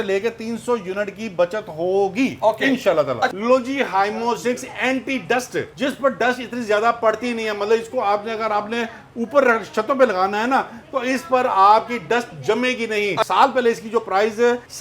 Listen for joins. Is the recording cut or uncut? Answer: cut